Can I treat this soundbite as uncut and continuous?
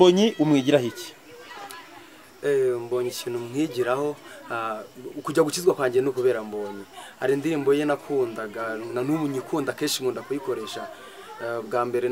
yes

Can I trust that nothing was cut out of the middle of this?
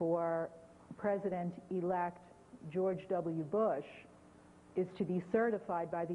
no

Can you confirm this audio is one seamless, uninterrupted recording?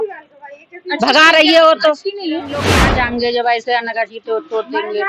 no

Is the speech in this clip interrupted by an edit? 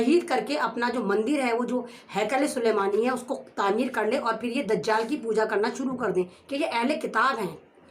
yes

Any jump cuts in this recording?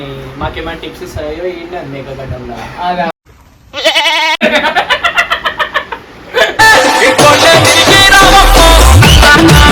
no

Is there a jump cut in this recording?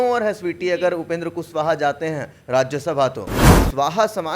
yes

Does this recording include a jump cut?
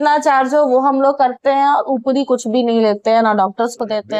no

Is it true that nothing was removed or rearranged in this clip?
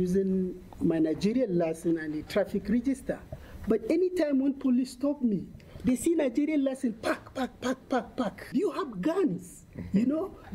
no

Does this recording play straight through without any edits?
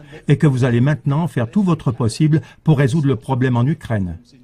no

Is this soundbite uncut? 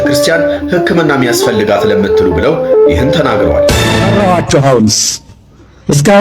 no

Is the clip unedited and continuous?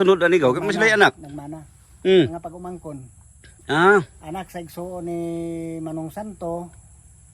yes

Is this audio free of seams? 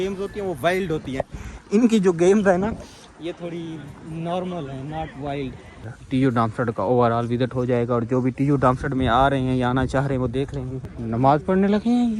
no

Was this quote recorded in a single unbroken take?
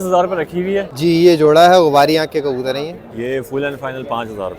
no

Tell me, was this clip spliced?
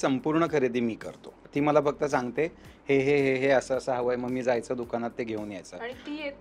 yes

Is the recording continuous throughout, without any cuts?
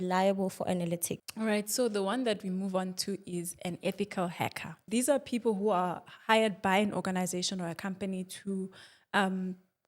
no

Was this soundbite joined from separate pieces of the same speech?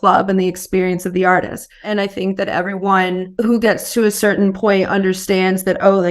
yes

